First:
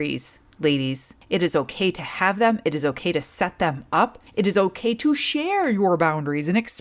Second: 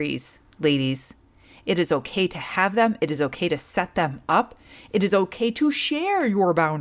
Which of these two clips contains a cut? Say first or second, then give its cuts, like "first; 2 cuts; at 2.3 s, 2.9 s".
first; 2 cuts; at 1.1 s, 4.2 s